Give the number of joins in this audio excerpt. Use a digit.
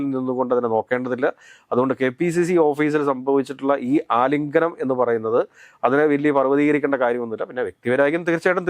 0